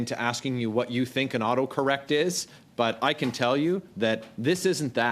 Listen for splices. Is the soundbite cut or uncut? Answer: uncut